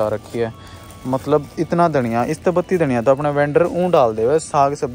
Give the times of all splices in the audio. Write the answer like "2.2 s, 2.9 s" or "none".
none